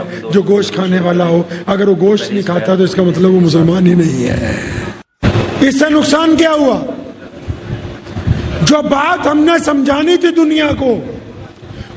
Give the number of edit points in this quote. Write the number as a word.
one